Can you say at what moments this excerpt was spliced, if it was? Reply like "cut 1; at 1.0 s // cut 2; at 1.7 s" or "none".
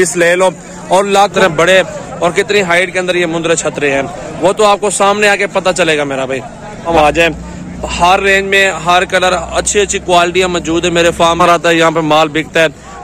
cut 1; at 1.3 s // cut 2; at 6.9 s // cut 3; at 11.4 s